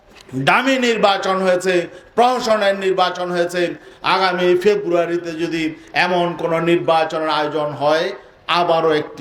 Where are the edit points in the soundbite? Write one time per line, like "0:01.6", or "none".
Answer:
none